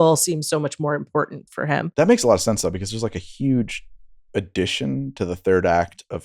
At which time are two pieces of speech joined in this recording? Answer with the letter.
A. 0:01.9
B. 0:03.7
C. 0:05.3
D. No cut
A